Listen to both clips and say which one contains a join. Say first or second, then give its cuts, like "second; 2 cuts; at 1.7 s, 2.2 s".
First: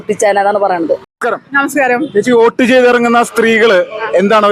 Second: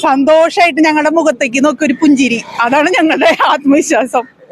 first; 1 cut; at 1.1 s